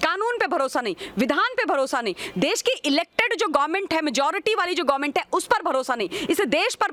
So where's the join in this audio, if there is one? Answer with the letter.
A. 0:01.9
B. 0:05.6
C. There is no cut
C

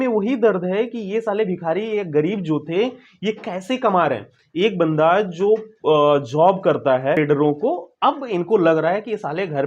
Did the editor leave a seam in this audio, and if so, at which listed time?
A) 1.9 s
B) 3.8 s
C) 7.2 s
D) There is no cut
C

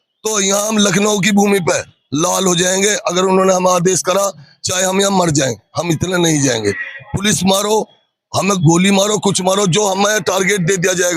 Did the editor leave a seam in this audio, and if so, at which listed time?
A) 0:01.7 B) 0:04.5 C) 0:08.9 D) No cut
D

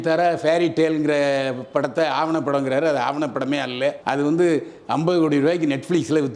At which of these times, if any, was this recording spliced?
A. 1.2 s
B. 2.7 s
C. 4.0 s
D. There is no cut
D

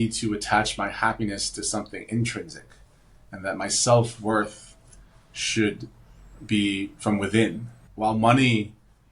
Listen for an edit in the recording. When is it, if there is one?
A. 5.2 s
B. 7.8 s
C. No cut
B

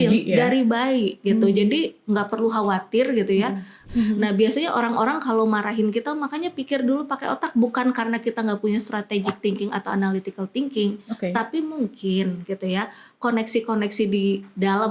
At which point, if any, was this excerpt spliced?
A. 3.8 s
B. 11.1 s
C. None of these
A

